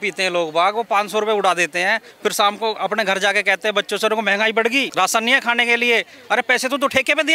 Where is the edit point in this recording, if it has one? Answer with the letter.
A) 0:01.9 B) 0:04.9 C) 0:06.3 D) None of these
B